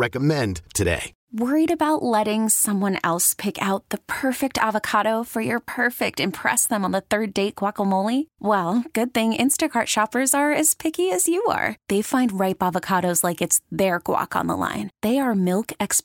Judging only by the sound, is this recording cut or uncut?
cut